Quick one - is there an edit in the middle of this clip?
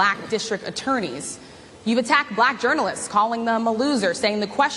yes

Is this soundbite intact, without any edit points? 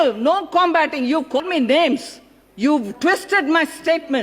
no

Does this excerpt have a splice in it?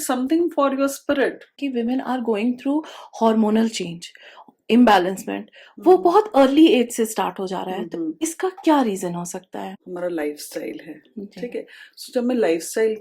yes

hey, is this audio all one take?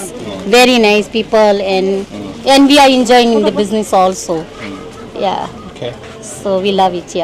yes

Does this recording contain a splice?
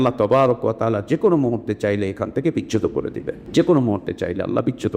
yes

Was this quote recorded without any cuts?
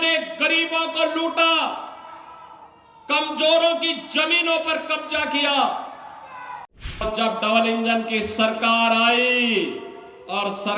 no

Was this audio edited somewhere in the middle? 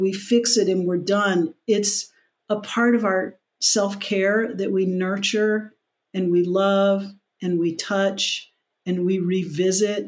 no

